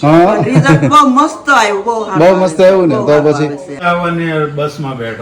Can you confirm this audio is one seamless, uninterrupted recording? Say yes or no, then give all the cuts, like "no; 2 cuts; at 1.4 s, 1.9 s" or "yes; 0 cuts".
no; 1 cut; at 3.8 s